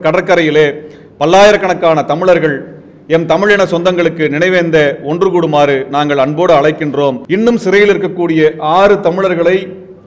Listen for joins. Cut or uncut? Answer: cut